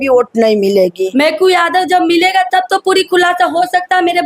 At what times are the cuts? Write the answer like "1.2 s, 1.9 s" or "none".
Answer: 1.0 s